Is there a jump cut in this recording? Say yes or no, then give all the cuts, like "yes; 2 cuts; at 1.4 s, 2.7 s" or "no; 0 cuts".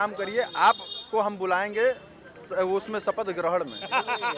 no; 0 cuts